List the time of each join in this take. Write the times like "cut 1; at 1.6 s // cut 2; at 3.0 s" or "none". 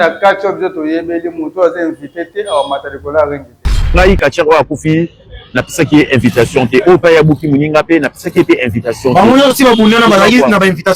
none